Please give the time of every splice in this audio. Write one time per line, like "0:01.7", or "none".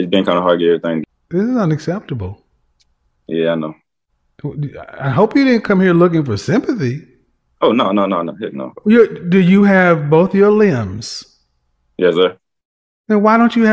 0:01.0